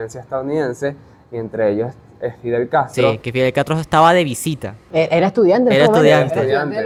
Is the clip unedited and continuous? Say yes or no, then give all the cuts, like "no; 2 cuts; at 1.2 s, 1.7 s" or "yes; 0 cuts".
yes; 0 cuts